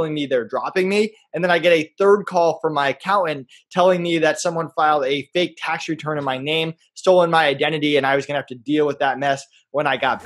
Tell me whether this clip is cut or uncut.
uncut